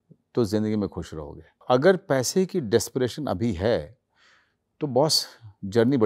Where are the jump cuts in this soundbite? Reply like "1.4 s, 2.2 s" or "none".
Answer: 1.6 s